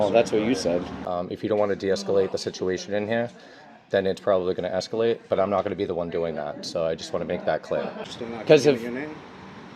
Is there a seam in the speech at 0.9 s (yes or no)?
yes